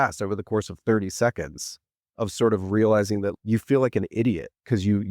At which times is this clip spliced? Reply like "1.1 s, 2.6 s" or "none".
3.3 s